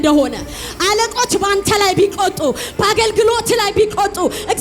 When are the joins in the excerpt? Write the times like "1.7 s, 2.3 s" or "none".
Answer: none